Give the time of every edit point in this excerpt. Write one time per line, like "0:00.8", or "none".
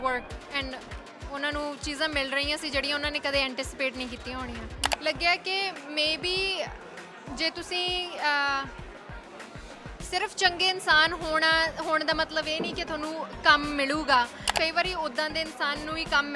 0:04.9
0:14.5